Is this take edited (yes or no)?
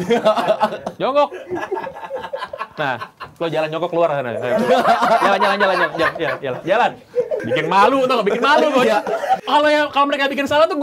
yes